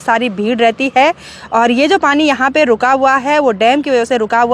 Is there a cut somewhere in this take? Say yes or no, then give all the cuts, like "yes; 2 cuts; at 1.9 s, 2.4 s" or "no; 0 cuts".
no; 0 cuts